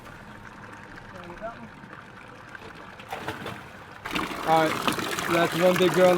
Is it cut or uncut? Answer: cut